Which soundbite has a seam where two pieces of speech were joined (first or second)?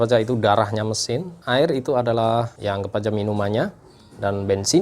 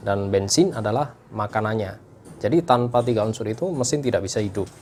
first